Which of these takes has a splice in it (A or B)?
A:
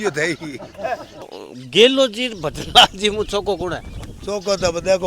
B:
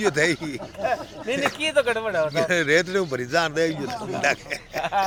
A